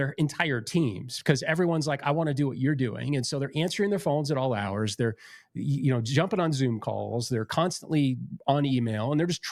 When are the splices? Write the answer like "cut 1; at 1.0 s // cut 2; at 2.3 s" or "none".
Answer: none